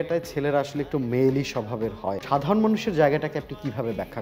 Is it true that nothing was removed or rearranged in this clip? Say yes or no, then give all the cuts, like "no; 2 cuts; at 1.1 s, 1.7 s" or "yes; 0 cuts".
no; 1 cut; at 2.2 s